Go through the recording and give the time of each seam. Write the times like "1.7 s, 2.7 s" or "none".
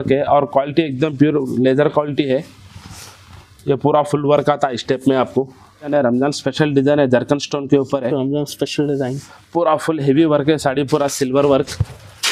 5.9 s